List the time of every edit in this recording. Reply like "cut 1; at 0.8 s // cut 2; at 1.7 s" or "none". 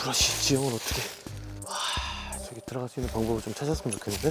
cut 1; at 1.7 s